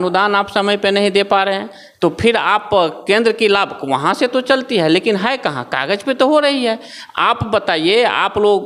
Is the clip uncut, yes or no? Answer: yes